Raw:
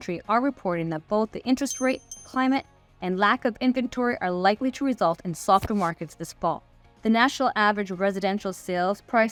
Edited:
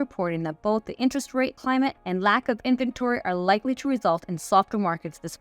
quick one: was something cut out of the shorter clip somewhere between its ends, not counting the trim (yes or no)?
yes